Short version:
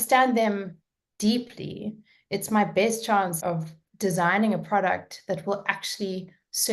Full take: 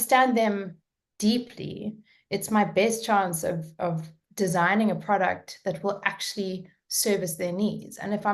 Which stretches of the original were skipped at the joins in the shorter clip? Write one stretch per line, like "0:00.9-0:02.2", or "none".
0:03.3-0:03.7